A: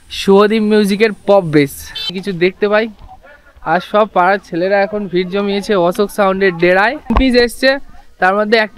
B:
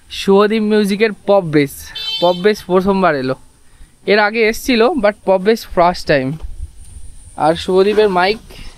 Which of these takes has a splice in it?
A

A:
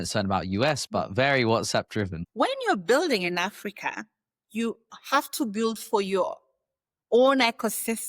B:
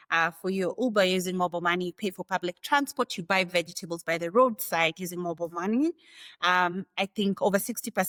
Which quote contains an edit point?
A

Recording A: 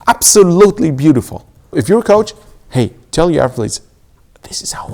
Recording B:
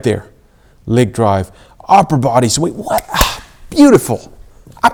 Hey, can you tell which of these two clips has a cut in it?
A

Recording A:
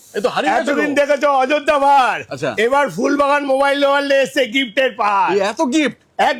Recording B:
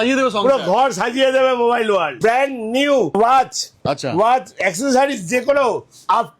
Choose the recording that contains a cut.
B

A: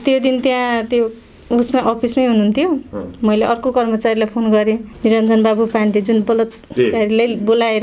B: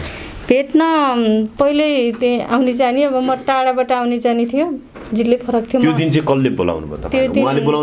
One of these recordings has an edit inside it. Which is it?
A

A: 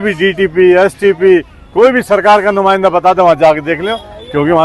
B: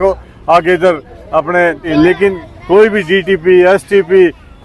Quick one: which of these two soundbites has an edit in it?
B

